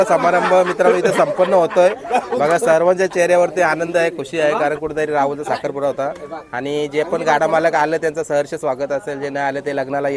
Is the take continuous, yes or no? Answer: yes